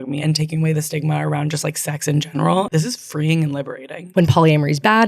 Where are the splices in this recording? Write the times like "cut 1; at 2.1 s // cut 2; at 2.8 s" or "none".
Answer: cut 1; at 2.7 s // cut 2; at 4.0 s